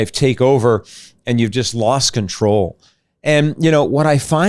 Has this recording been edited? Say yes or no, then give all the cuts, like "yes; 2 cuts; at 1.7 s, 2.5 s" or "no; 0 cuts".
no; 0 cuts